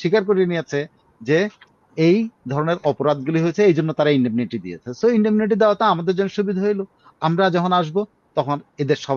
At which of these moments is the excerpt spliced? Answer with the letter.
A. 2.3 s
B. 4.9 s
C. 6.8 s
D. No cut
D